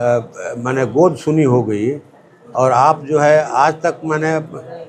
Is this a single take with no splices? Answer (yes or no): yes